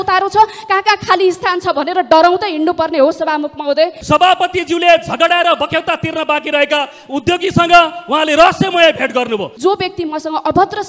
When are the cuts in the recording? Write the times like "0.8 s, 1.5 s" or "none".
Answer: 4.0 s, 9.5 s